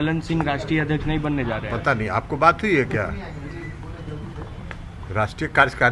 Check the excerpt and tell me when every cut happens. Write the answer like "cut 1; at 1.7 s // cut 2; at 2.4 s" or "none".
none